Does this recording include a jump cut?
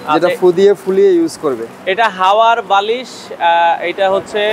no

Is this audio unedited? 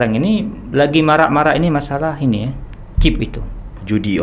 yes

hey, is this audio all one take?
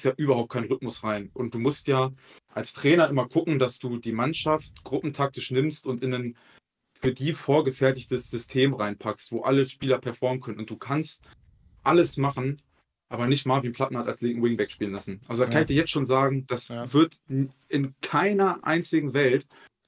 yes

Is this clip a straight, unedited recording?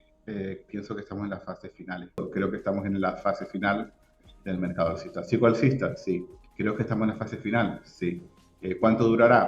no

